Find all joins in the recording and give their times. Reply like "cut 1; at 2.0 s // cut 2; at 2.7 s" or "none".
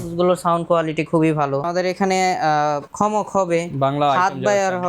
cut 1; at 1.7 s // cut 2; at 2.9 s